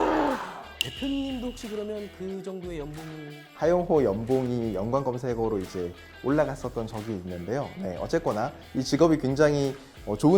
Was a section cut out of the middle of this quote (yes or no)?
yes